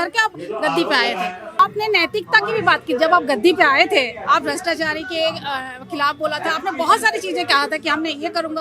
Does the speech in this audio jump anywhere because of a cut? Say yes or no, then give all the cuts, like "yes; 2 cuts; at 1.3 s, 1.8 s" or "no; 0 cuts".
yes; 1 cut; at 1.6 s